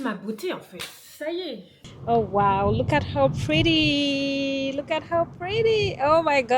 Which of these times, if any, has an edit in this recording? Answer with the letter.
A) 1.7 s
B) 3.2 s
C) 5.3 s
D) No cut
A